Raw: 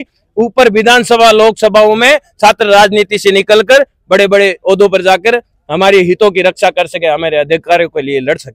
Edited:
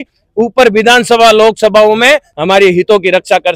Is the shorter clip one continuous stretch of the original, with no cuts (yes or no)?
no